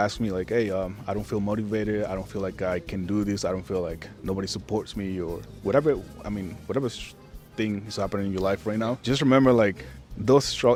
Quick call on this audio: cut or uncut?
uncut